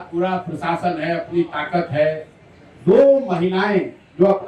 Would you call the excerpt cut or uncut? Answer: uncut